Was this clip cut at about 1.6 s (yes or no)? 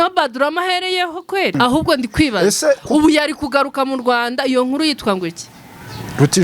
yes